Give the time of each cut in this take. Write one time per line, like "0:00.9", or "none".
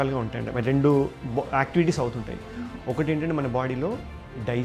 none